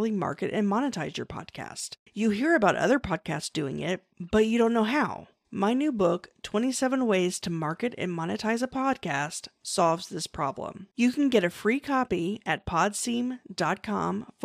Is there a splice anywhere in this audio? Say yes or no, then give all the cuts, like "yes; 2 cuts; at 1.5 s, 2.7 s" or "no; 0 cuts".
no; 0 cuts